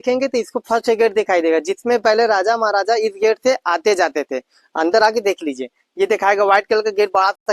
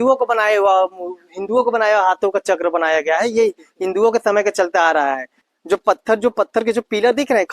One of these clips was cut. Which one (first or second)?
second